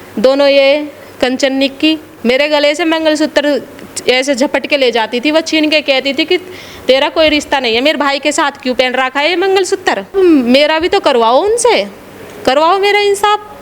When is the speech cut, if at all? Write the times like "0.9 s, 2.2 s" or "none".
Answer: 2.1 s, 10.1 s